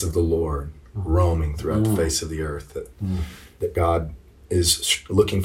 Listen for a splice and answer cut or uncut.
cut